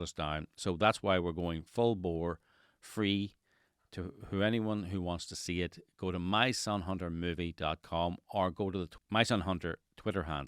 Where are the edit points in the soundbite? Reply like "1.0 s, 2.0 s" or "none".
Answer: 8.9 s

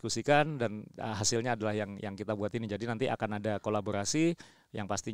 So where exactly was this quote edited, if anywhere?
none

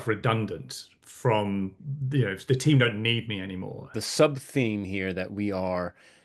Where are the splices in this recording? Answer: 3.9 s

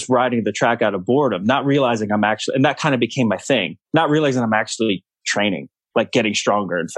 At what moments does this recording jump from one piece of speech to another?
3.8 s, 5.7 s

